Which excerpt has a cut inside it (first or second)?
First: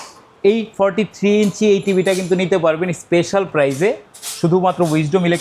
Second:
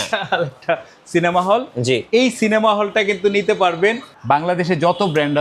second